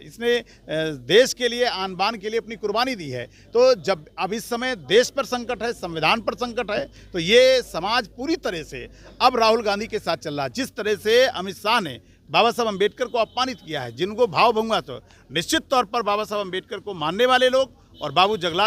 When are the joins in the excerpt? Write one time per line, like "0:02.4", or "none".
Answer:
none